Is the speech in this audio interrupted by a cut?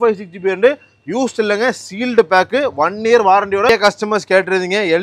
yes; 1 cut; at 3.7 s

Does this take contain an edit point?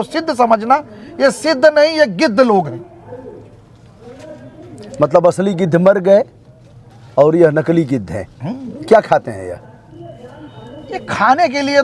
no; 0 cuts

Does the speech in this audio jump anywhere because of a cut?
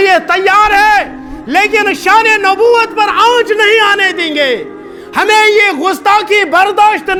no; 0 cuts

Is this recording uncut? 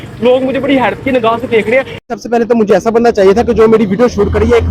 yes; 0 cuts

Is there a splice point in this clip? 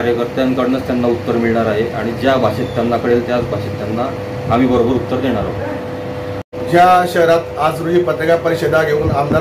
no; 0 cuts

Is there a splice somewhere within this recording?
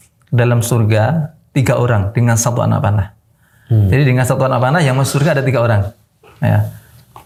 no; 0 cuts

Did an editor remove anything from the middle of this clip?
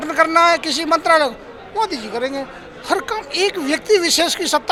no; 0 cuts

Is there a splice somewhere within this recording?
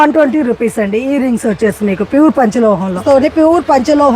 yes; 1 cut; at 3.0 s

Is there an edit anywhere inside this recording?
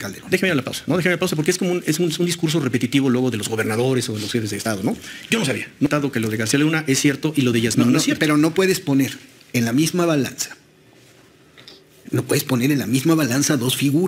yes; 1 cut; at 5.9 s

